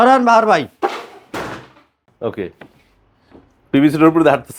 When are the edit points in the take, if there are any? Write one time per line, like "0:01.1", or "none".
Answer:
0:02.1